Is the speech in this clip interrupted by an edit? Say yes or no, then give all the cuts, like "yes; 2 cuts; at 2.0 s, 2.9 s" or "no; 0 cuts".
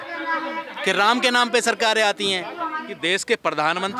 yes; 1 cut; at 2.9 s